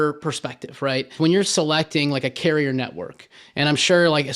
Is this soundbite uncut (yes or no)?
no